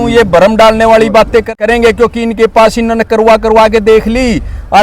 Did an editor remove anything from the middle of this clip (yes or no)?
yes